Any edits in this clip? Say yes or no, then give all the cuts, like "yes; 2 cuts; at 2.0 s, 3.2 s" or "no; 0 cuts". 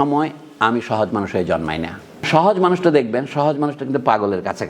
yes; 1 cut; at 2.2 s